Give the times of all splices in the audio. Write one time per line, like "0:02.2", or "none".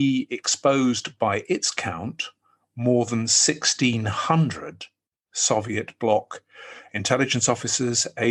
none